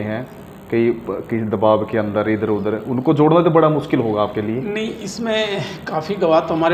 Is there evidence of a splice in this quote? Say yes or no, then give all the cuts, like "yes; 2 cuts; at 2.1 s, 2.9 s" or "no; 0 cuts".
no; 0 cuts